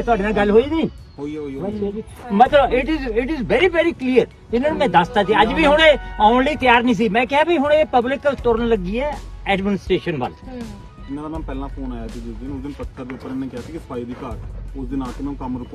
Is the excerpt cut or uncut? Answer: uncut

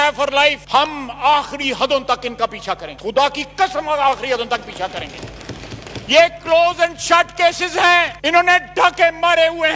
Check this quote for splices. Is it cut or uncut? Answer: uncut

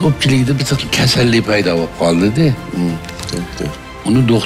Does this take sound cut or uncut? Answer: uncut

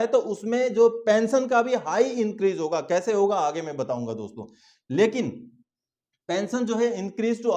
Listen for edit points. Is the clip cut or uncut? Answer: uncut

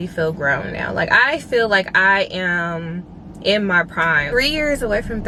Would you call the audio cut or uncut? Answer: uncut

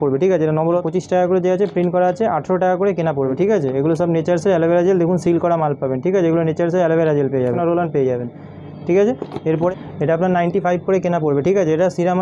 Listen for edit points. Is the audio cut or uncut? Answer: cut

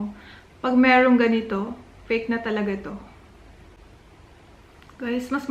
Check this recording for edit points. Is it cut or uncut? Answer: cut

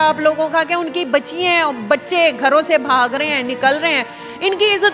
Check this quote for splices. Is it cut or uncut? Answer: uncut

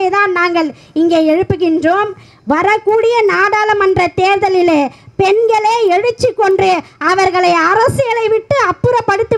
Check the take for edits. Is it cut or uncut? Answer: cut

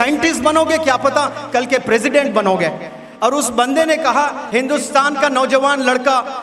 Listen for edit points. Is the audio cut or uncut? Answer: uncut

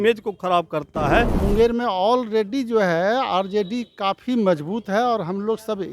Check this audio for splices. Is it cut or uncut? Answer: cut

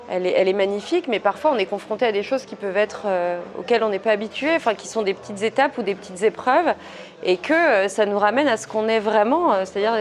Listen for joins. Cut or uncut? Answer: uncut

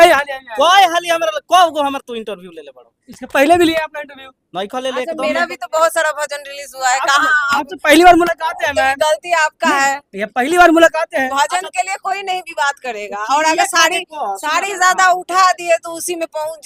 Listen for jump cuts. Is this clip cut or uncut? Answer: uncut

